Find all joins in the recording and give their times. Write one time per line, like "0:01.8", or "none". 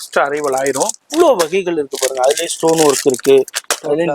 0:01.0